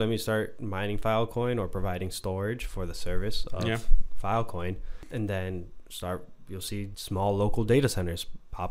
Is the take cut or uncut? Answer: cut